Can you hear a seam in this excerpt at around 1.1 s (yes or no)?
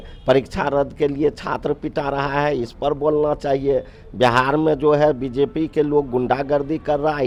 no